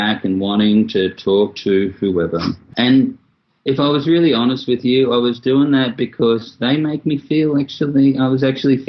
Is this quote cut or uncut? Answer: cut